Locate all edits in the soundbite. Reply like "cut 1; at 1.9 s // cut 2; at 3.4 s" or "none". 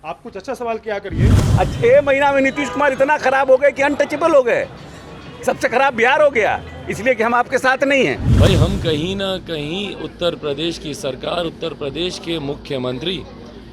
cut 1; at 1.4 s // cut 2; at 8.3 s

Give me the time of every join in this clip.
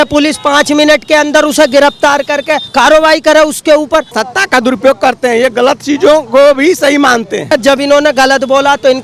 cut 1; at 2.7 s // cut 2; at 4.2 s // cut 3; at 7.5 s

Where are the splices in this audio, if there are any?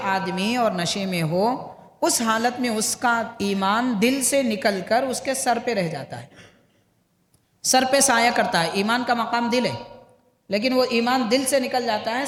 none

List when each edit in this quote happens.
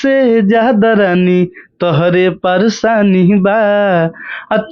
none

